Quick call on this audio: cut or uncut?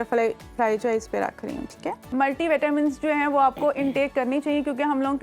cut